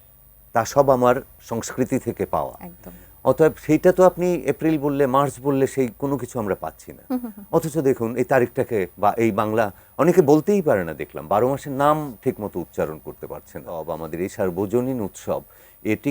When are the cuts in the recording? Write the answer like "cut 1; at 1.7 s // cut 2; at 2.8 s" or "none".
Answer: cut 1; at 13.9 s